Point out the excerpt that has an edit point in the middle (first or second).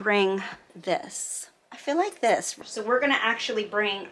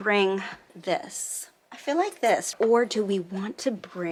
first